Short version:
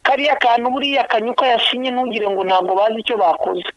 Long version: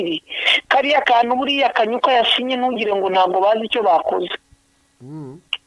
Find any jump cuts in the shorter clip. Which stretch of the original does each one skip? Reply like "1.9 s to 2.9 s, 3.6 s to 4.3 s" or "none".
none